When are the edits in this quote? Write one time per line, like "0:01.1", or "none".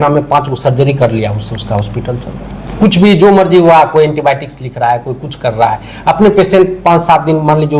0:02.7